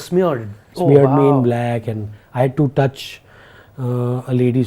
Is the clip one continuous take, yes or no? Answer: yes